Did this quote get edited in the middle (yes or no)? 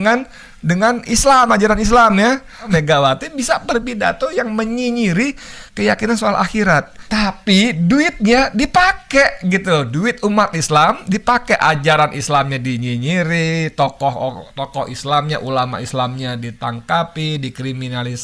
yes